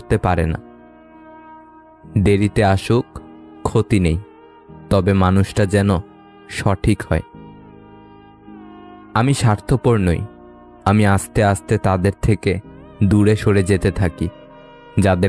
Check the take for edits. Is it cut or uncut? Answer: uncut